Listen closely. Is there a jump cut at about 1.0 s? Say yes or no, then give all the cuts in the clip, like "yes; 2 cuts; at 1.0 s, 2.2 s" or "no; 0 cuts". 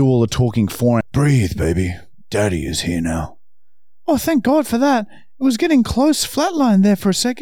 yes; 1 cut; at 1.0 s